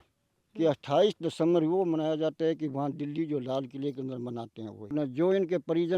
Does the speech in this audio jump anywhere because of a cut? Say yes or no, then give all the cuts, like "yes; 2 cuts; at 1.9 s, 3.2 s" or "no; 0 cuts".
yes; 1 cut; at 4.9 s